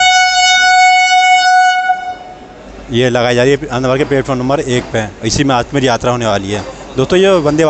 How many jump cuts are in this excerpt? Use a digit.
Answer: 0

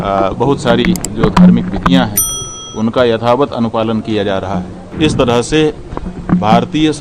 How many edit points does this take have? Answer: 1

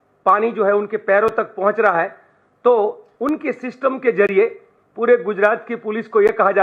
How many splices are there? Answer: 0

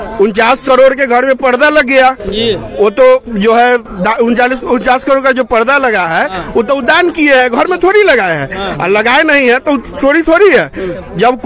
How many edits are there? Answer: 0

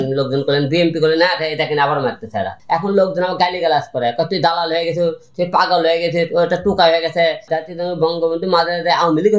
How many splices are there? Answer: 2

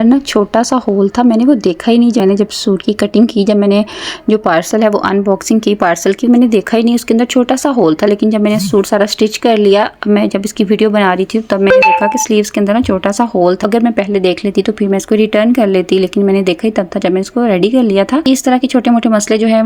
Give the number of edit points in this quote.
3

